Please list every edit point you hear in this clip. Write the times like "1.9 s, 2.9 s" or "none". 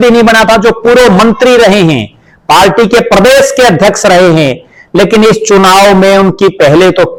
none